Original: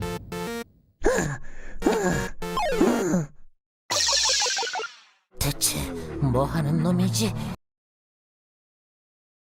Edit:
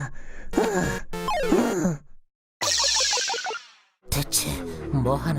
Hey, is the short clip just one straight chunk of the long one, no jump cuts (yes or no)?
yes